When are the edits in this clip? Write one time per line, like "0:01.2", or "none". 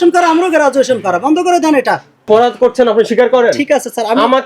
0:02.2